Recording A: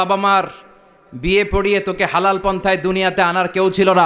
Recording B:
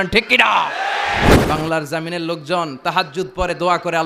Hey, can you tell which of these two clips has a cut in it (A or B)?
B